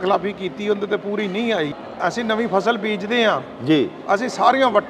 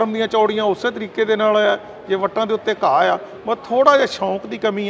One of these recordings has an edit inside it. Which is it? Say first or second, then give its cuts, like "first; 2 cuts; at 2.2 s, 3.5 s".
first; 1 cut; at 1.7 s